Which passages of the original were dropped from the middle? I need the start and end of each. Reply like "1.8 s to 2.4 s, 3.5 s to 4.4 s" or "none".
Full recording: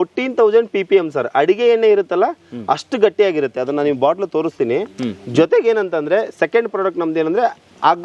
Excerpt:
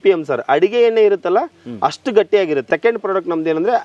3.5 s to 6.3 s